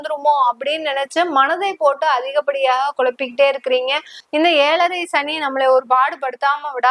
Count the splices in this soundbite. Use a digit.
1